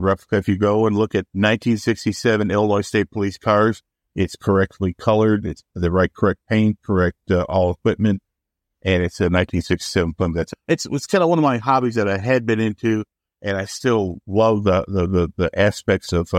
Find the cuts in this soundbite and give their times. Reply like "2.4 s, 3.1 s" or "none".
1.3 s, 10.5 s